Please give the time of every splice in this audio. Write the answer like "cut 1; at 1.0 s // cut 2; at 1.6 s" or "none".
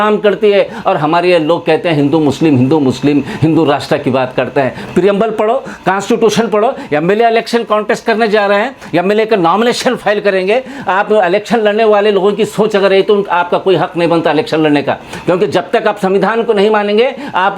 none